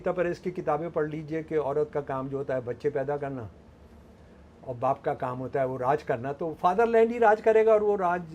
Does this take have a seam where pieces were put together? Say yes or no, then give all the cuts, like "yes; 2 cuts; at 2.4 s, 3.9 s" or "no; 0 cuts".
no; 0 cuts